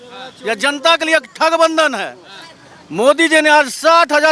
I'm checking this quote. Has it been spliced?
no; 0 cuts

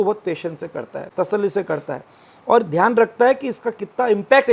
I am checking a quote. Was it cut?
no; 0 cuts

